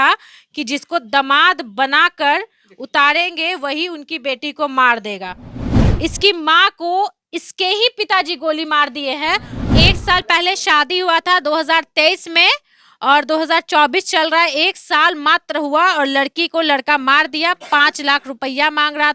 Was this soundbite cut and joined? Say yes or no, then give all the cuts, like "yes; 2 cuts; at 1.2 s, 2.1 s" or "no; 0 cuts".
yes; 2 cuts; at 5.6 s, 9.5 s